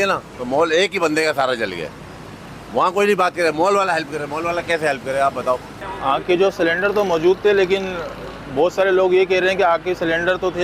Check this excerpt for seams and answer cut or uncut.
cut